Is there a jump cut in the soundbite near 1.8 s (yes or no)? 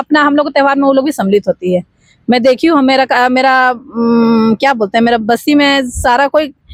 no